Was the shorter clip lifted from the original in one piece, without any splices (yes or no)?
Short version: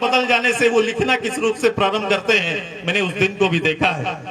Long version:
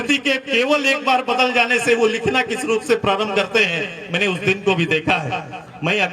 yes